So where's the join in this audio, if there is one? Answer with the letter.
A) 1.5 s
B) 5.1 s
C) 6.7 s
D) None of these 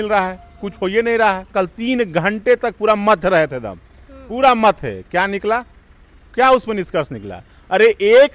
A